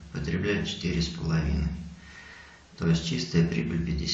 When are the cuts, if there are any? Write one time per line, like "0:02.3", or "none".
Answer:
none